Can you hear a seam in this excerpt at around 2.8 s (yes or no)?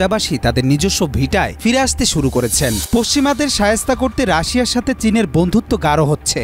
yes